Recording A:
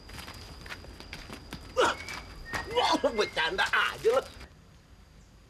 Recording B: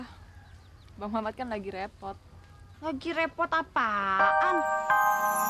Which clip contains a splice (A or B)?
B